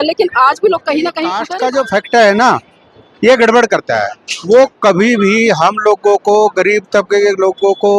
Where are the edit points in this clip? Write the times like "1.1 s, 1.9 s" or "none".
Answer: 1.5 s